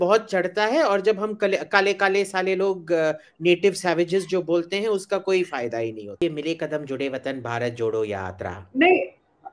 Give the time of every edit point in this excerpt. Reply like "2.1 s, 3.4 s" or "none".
6.2 s